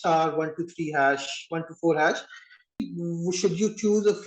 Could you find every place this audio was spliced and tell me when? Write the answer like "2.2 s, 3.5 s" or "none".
2.8 s